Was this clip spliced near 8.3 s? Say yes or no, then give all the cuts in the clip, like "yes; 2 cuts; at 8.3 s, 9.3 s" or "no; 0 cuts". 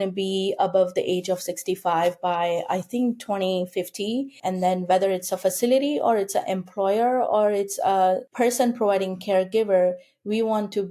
yes; 2 cuts; at 4.4 s, 8.3 s